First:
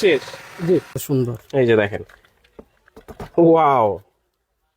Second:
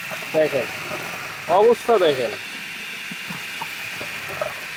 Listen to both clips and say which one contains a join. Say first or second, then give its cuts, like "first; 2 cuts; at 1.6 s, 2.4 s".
first; 1 cut; at 1.0 s